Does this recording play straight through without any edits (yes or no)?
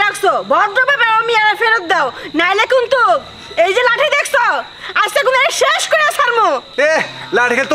yes